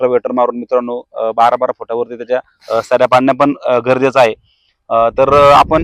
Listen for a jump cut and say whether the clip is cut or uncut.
uncut